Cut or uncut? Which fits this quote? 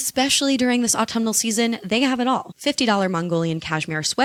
uncut